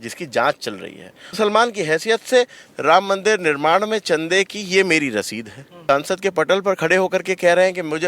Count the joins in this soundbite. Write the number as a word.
two